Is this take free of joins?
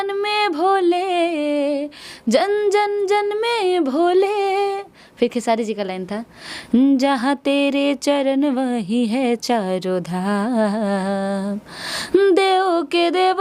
yes; 0 cuts

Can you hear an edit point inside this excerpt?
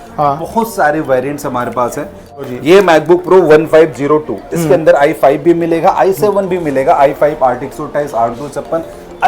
yes; 1 cut; at 2.4 s

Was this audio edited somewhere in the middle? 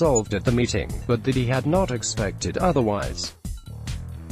yes; 1 cut; at 3.1 s

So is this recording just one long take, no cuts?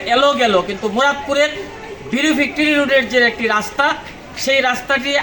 yes; 0 cuts

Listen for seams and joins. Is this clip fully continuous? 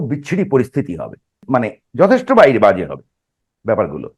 no; 1 cut; at 1.4 s

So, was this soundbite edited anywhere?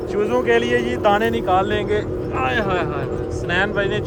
no; 0 cuts

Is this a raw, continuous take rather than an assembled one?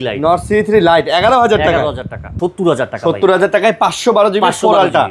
no; 1 cut; at 2.3 s

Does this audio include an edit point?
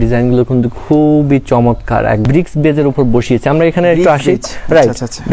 yes; 1 cut; at 2.2 s

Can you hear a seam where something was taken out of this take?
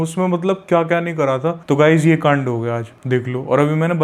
yes; 1 cut; at 1.6 s

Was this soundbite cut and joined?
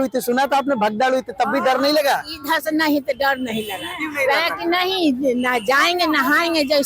no; 0 cuts

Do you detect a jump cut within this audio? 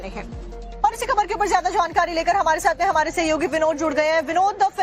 yes; 1 cut; at 1.0 s

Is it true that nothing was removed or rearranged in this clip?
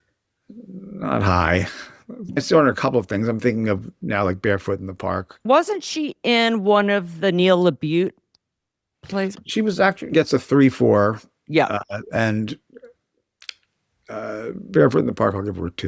no; 3 cuts; at 2.3 s, 5.5 s, 9.3 s

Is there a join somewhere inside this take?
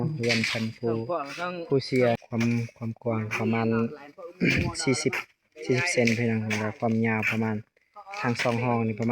yes; 1 cut; at 2.2 s

